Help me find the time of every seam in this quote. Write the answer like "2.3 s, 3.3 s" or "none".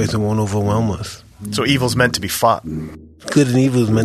1.4 s, 2.8 s